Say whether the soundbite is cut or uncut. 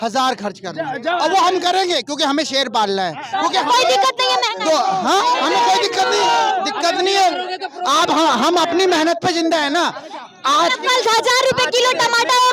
uncut